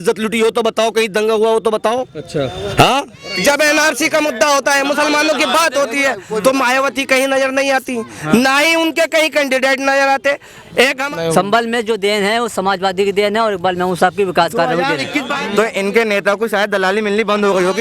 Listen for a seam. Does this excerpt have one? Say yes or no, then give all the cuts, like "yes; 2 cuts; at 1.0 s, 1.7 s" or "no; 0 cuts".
yes; 3 cuts; at 3.2 s, 11.0 s, 15.4 s